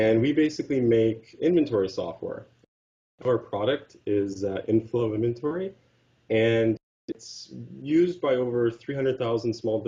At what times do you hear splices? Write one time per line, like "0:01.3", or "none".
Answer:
none